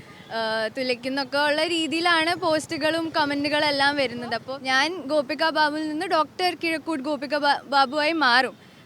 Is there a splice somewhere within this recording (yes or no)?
yes